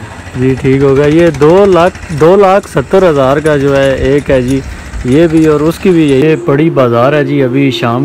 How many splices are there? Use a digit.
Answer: 1